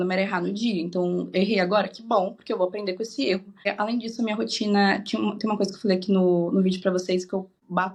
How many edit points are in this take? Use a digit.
0